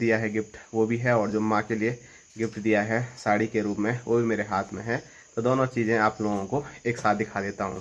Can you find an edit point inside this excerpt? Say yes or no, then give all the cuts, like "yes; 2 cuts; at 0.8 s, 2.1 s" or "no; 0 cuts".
no; 0 cuts